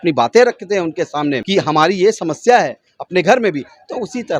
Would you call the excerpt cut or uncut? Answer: cut